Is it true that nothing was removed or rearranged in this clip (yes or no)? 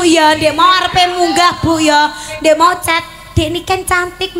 yes